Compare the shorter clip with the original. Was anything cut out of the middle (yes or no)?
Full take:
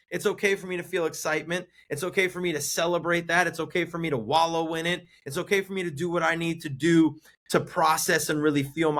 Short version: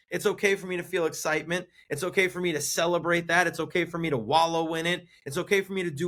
no